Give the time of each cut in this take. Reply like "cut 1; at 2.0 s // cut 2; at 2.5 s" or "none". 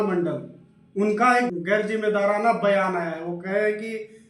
cut 1; at 1.5 s